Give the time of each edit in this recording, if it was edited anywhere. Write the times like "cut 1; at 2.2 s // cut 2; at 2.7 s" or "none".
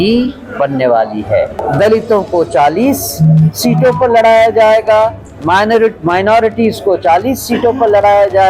cut 1; at 1.6 s